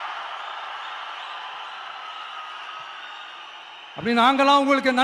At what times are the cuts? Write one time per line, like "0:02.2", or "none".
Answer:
none